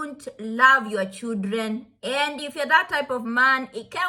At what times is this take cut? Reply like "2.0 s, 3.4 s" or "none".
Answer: none